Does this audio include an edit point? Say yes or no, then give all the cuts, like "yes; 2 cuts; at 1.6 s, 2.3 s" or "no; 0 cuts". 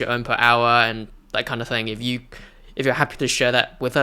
no; 0 cuts